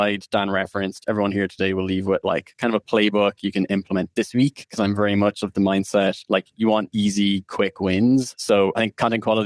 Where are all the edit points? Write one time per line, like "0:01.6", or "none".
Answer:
0:06.2